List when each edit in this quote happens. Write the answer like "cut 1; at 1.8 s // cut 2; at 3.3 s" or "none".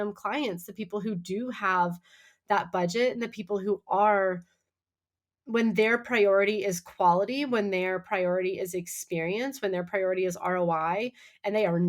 none